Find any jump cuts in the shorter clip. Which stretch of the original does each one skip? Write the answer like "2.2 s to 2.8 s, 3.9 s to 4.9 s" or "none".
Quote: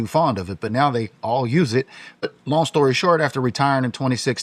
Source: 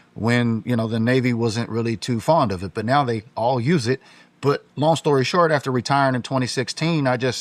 4.4 s to 4.6 s